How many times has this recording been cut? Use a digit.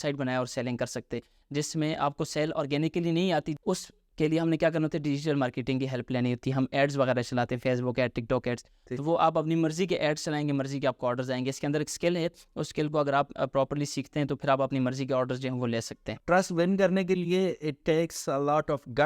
2